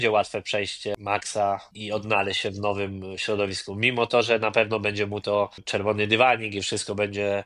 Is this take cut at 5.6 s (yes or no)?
yes